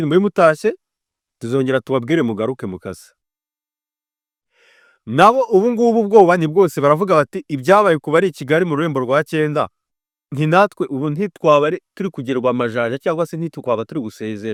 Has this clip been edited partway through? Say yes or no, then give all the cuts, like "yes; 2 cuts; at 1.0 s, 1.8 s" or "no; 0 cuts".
no; 0 cuts